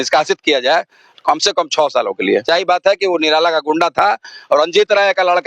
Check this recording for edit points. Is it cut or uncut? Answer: cut